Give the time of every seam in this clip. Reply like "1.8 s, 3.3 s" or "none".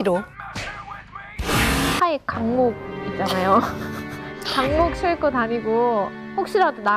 2.0 s